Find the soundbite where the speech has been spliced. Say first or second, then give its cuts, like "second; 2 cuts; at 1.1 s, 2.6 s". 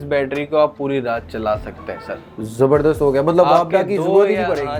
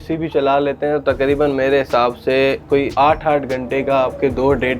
second; 1 cut; at 2.9 s